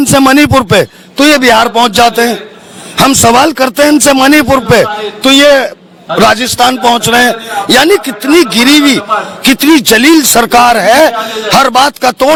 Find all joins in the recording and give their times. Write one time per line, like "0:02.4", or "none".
none